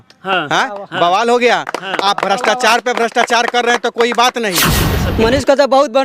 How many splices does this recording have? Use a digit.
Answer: 1